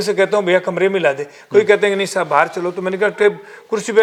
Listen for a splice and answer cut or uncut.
uncut